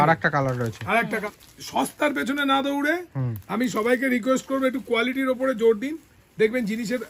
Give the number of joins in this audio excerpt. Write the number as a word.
one